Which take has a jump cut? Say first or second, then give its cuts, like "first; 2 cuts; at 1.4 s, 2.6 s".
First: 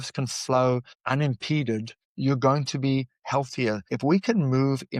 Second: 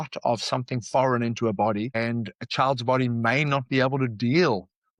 first; 3 cuts; at 0.9 s, 2.0 s, 3.9 s